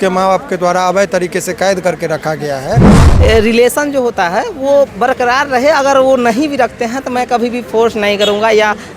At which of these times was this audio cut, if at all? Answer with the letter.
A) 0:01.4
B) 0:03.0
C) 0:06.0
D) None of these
B